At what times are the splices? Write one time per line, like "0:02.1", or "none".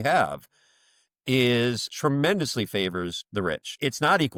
none